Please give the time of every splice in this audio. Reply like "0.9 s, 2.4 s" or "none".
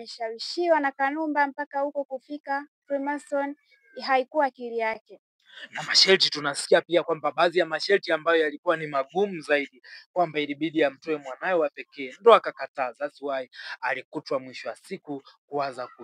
none